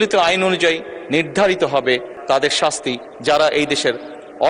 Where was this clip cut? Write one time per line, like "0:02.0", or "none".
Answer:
0:02.2

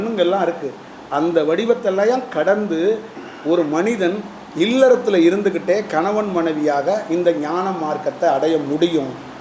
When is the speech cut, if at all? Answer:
none

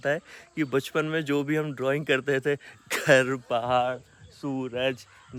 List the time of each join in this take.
none

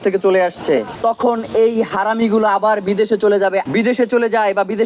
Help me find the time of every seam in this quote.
0:00.9
0:03.7

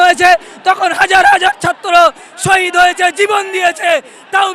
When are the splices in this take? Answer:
none

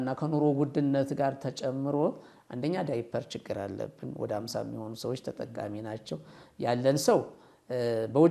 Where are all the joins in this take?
none

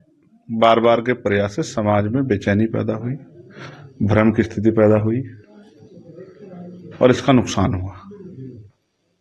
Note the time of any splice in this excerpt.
none

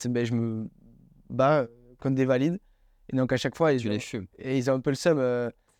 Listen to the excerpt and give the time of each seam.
none

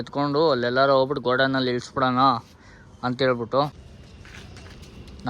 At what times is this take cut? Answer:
0:03.8

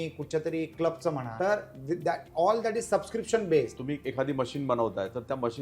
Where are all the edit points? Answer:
0:01.3
0:03.8

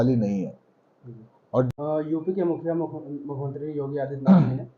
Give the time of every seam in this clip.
0:01.7

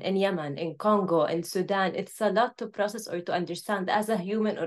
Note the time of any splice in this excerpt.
none

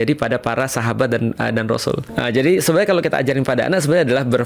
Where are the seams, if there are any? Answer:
0:02.3

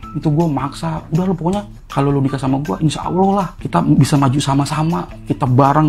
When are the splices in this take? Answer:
0:01.8
0:03.6

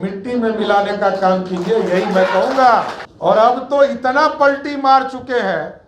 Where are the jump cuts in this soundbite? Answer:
0:03.0

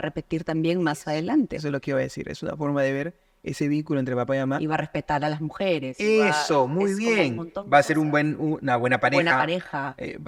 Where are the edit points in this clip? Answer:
none

